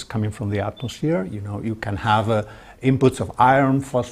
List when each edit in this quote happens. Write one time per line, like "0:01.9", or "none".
0:00.9